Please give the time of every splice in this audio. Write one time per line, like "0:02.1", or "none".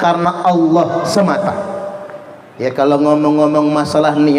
none